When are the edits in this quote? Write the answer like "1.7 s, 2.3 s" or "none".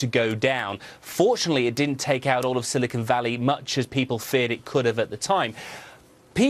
4.9 s